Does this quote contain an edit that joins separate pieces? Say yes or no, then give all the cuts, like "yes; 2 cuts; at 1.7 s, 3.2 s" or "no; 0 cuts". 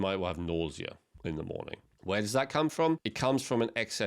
yes; 3 cuts; at 1.0 s, 1.9 s, 3.1 s